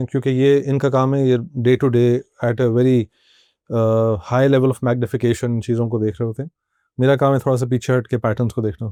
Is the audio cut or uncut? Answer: uncut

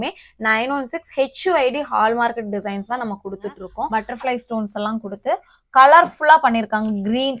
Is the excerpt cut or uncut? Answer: cut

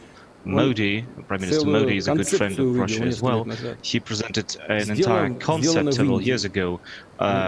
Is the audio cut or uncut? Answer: uncut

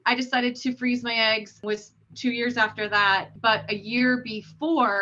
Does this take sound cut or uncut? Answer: cut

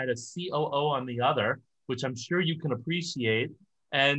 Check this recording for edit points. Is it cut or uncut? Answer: uncut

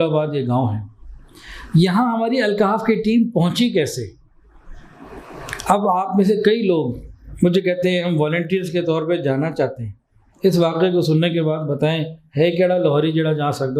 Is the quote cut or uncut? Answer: uncut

